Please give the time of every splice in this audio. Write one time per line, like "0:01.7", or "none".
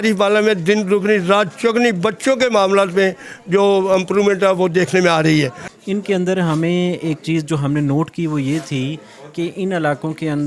0:05.6